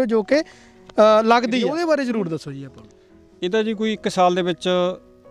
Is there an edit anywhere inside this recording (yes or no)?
yes